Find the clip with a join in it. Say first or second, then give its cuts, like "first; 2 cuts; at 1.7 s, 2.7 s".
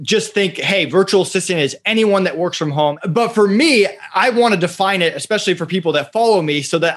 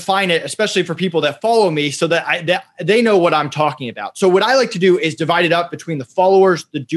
first; 1 cut; at 3.0 s